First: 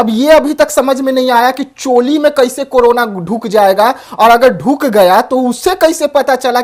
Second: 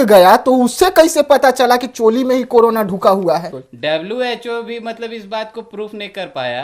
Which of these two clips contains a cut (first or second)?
second